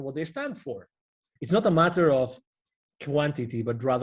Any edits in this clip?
yes; 1 cut; at 1.3 s

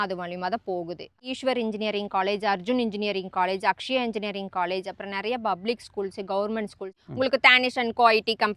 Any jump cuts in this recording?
yes; 2 cuts; at 1.3 s, 6.9 s

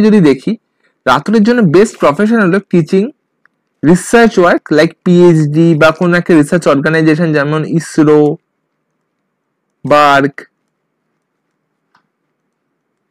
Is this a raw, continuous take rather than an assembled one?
yes; 0 cuts

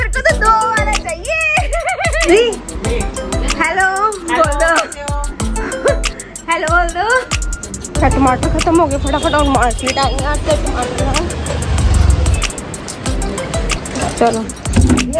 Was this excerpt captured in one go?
no; 2 cuts; at 2.2 s, 12.3 s

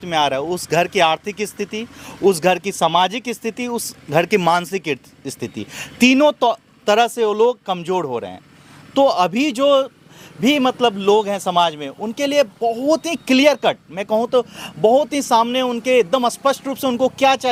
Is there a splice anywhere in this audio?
no; 0 cuts

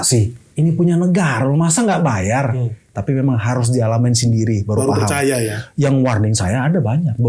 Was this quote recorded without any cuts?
yes; 0 cuts

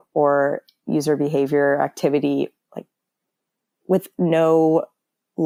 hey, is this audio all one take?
yes; 0 cuts

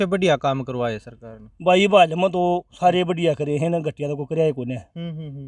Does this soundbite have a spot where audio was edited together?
no; 0 cuts

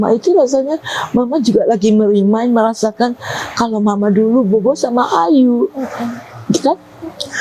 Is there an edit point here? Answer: no; 0 cuts

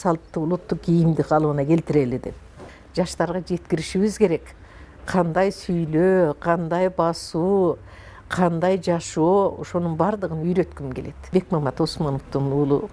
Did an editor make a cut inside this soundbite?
yes; 2 cuts; at 2.5 s, 11.2 s

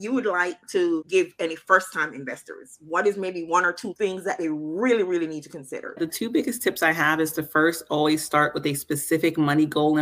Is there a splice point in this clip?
yes; 3 cuts; at 1.1 s, 3.9 s, 6.0 s

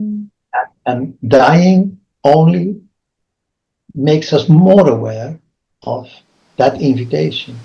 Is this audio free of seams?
yes; 0 cuts

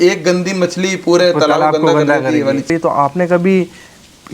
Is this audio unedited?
no; 1 cut; at 2.7 s

